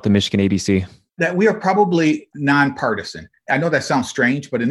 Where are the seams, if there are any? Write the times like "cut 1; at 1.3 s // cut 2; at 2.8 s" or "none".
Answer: cut 1; at 1.0 s